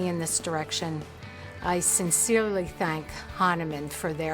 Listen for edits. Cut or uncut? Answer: uncut